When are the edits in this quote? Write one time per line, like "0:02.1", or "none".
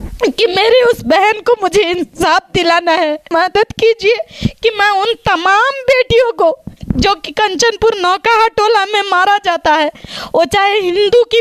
0:03.3